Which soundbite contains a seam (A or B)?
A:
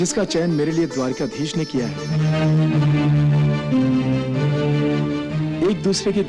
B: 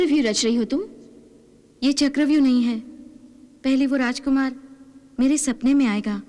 A